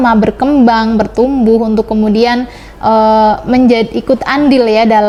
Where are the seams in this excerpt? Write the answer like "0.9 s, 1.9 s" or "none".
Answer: none